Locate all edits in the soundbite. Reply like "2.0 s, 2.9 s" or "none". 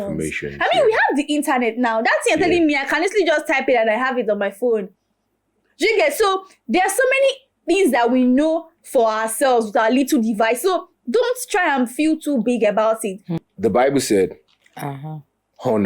13.3 s